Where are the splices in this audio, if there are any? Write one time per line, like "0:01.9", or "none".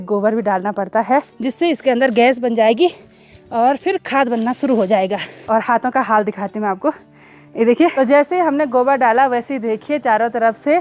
0:01.3
0:05.2
0:07.9